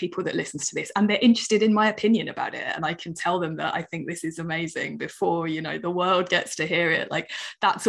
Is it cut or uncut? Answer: uncut